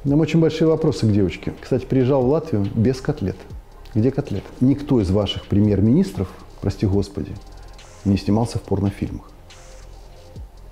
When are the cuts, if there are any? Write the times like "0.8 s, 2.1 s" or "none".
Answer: 1.5 s, 4.5 s